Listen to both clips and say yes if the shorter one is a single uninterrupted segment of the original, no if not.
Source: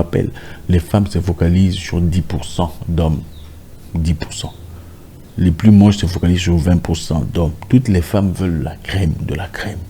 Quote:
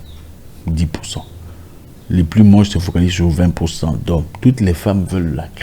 yes